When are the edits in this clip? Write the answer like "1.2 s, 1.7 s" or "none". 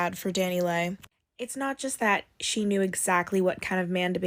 none